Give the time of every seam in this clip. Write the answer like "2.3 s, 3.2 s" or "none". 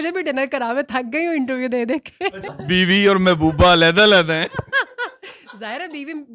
2.5 s